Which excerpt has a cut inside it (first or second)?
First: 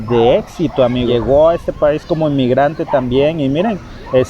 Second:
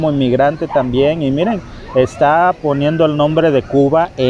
first